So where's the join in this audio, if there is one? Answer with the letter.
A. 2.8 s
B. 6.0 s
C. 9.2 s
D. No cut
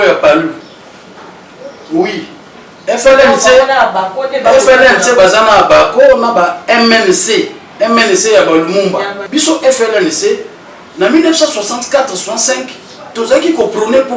C